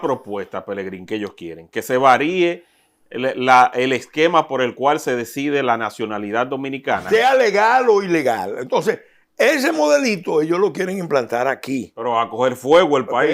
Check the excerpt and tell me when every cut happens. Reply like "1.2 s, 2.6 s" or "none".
7.1 s

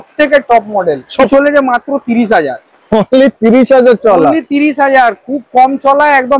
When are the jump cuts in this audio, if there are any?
1.3 s

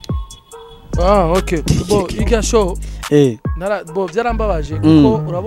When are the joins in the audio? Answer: 1.0 s

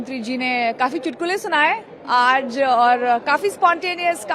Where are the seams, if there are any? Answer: none

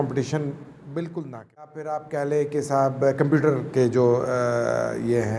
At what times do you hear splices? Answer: 1.9 s

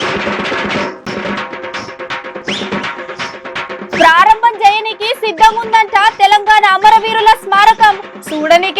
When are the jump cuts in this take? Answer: 1.0 s, 3.6 s

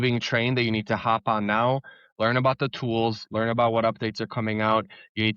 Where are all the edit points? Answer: none

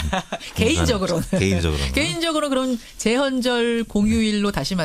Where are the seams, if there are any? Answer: none

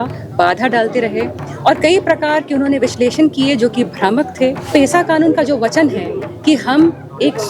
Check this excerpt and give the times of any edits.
4.7 s

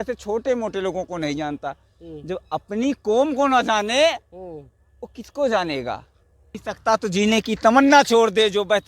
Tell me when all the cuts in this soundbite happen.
6.6 s

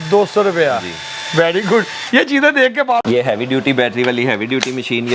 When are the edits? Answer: 3.0 s

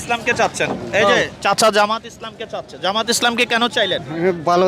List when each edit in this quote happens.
none

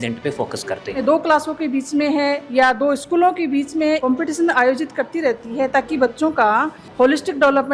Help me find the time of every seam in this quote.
1.0 s, 4.0 s, 6.8 s

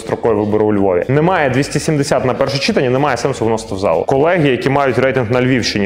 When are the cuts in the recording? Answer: 1.1 s, 4.1 s

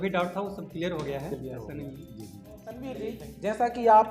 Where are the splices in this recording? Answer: 2.8 s

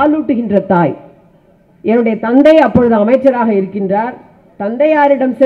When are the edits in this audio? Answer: none

